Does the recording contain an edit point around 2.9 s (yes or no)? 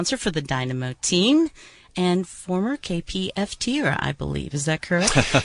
yes